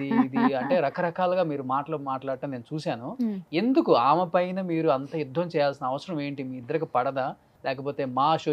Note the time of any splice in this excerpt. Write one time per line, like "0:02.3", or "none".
0:07.5